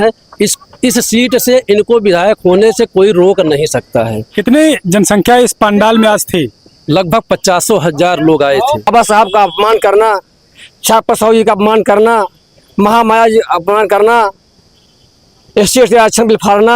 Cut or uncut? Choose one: cut